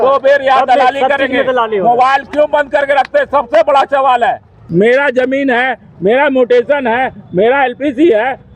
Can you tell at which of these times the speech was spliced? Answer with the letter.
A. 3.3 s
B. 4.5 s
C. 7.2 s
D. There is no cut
B